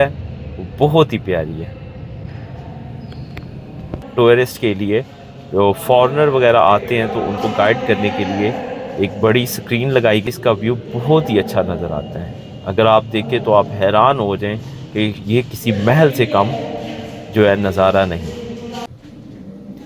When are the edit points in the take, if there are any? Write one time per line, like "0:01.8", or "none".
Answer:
0:04.1
0:10.2
0:18.9